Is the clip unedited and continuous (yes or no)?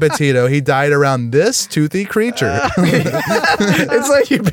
yes